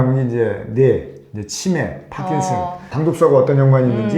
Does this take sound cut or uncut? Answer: cut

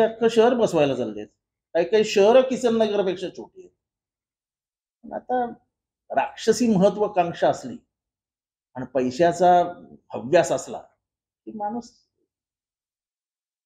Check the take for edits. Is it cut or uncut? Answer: uncut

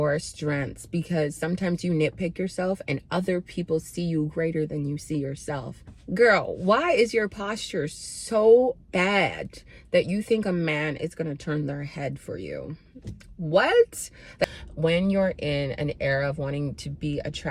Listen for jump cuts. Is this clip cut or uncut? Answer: cut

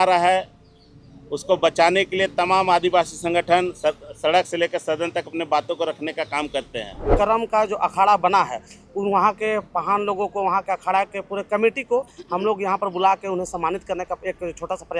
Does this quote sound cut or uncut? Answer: cut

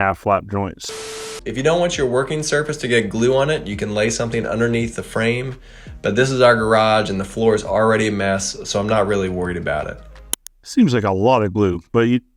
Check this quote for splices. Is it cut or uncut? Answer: cut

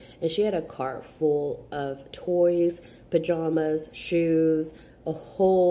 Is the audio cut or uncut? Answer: uncut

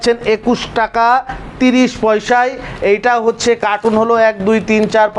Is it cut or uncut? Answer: uncut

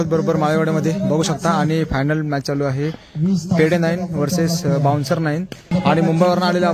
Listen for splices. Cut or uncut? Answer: cut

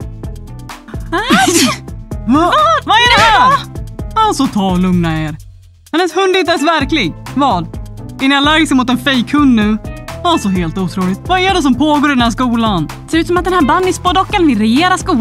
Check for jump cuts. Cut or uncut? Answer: cut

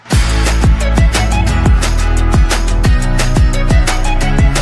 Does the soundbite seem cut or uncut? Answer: uncut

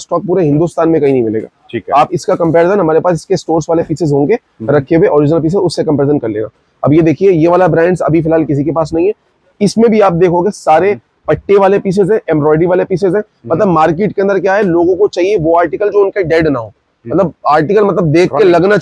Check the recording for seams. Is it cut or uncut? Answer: uncut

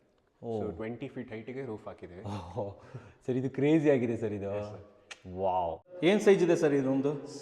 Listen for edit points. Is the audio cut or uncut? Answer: cut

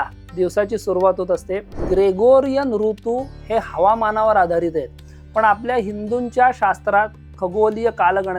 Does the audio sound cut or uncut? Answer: cut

